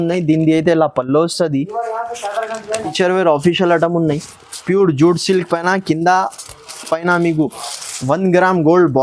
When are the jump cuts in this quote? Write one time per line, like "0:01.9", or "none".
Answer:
0:02.9